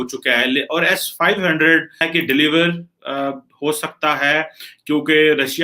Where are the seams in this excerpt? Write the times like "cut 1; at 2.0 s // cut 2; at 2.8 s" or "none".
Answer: cut 1; at 2.0 s